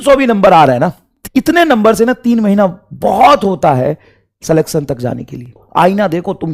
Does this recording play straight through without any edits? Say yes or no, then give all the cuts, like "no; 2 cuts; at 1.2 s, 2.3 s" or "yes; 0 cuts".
no; 2 cuts; at 1.1 s, 5.6 s